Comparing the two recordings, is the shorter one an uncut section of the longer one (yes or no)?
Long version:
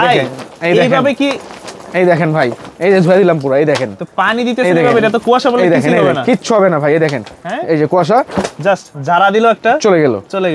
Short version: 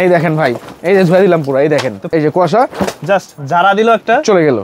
no